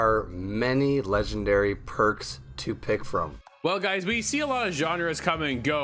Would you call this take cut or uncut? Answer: cut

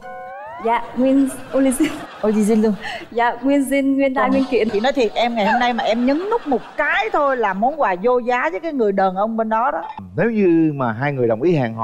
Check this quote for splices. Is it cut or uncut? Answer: cut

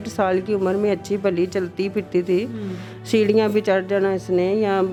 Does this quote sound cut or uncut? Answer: uncut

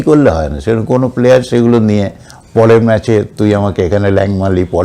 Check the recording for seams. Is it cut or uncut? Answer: uncut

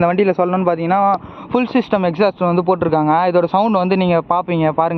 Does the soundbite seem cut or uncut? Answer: uncut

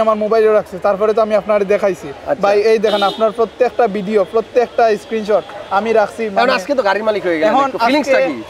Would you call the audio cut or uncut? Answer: uncut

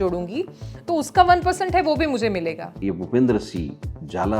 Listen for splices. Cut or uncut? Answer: cut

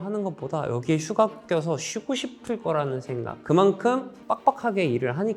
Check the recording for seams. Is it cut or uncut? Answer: uncut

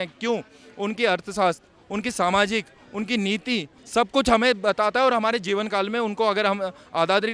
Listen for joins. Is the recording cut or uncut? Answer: cut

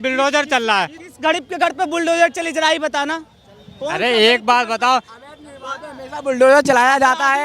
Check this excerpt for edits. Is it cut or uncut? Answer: cut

